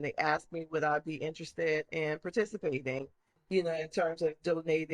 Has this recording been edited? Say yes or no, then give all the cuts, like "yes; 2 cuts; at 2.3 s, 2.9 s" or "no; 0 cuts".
yes; 1 cut; at 3.3 s